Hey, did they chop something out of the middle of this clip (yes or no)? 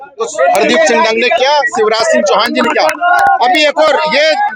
no